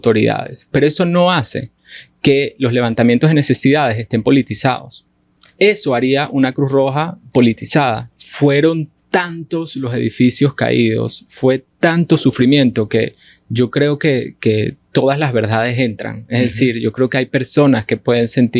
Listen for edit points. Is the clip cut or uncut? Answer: cut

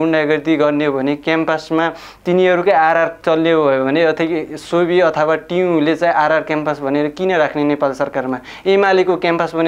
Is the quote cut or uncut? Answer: uncut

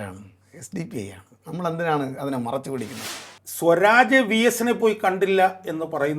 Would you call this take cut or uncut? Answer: cut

